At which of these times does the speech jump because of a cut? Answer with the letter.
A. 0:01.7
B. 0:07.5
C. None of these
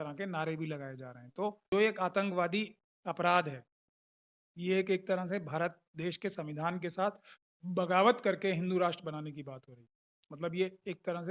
A